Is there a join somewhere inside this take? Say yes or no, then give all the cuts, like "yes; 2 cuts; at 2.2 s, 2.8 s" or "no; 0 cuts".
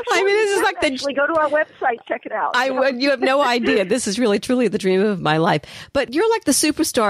yes; 1 cut; at 6.1 s